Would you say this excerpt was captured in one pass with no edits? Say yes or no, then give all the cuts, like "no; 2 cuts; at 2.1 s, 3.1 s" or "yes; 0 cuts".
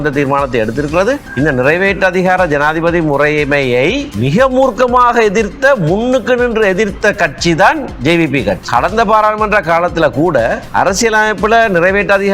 no; 4 cuts; at 1.3 s, 4.1 s, 8.6 s, 10.6 s